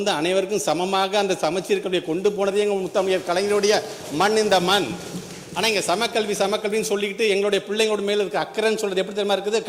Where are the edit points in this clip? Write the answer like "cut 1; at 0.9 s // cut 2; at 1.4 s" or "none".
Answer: none